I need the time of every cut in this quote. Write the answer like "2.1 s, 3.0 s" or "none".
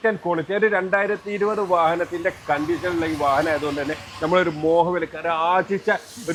none